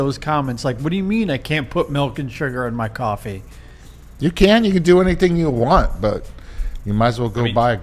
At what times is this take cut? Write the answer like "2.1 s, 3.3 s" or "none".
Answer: none